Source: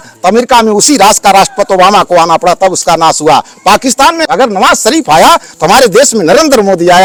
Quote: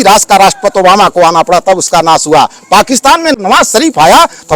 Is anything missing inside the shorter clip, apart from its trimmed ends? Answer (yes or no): yes